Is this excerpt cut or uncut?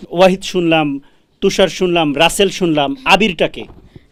uncut